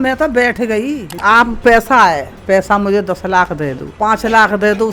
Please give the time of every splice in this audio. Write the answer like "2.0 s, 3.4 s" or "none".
1.2 s, 3.8 s